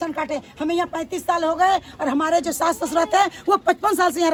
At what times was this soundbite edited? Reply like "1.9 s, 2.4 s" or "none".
none